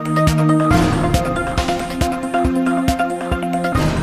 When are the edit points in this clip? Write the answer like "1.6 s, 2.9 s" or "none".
none

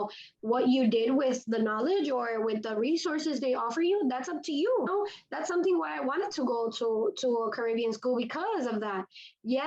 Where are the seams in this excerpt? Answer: 4.9 s

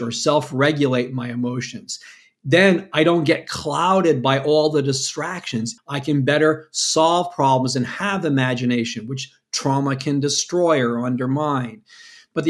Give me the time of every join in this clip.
5.7 s

